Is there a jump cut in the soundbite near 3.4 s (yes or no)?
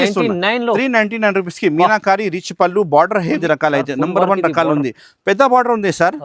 yes